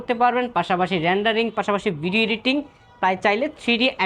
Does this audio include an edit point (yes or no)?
no